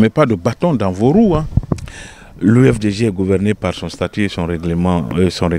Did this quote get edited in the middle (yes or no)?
no